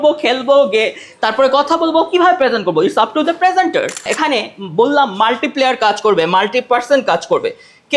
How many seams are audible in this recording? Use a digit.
1